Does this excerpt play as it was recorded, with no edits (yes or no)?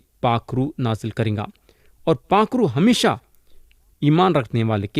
yes